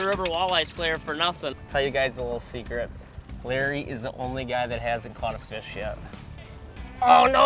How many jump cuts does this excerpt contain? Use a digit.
3